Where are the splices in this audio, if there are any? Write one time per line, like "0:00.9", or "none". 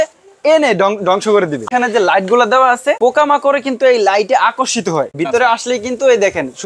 0:01.7
0:03.0
0:05.1

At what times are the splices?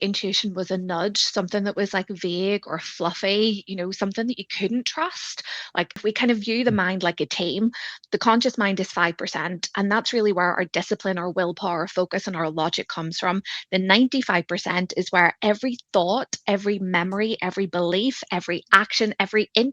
0:06.0

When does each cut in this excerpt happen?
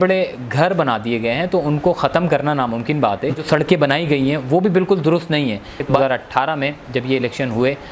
0:03.5
0:06.0

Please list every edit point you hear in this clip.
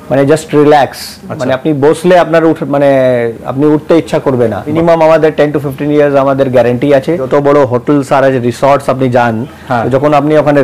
0:04.7
0:07.2

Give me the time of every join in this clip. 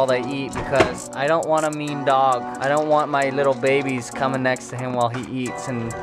0:02.5

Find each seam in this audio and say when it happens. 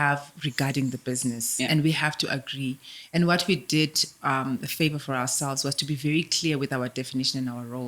none

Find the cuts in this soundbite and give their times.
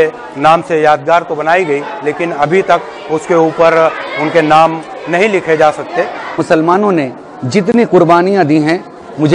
0:06.4

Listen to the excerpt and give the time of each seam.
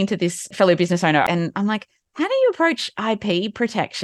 0:01.2

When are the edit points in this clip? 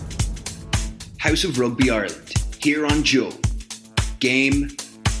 none

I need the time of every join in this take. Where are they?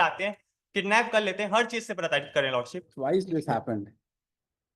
0:02.9

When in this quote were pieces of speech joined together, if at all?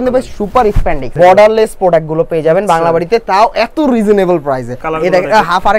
0:01.1
0:04.8

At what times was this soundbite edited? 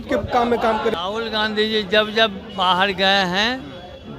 0:00.9

